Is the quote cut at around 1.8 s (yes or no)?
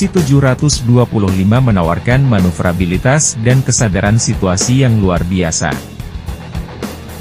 no